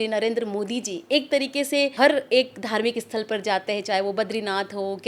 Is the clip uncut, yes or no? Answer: no